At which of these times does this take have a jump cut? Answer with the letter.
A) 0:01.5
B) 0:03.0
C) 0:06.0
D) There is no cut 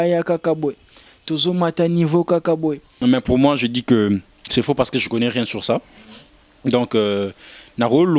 B